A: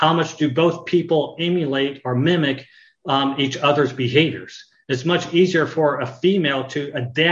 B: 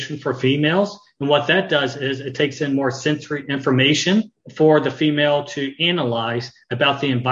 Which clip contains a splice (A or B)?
B